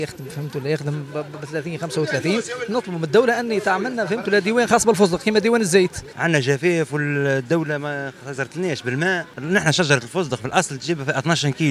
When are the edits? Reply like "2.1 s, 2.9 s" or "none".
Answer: 6.1 s, 9.3 s

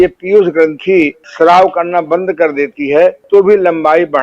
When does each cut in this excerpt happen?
1.2 s, 3.2 s

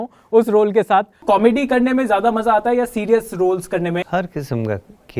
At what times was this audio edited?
1.2 s, 4.0 s

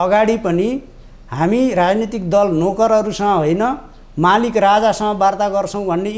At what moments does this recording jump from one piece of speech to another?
none

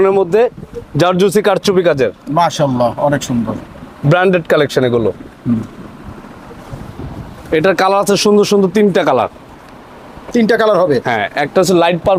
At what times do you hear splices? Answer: none

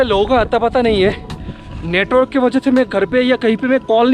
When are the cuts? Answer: none

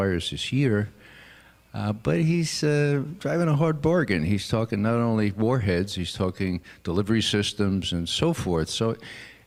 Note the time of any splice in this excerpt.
none

